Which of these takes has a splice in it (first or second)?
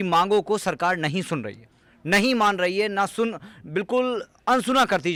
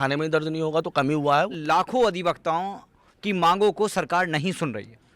second